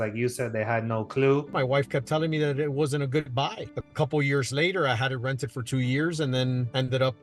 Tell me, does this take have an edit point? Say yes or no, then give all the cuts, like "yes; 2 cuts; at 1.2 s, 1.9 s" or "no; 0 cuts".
yes; 2 cuts; at 1.5 s, 3.7 s